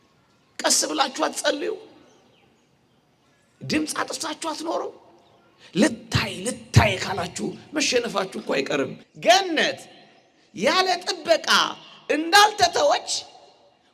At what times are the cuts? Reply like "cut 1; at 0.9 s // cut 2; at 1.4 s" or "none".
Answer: cut 1; at 9.1 s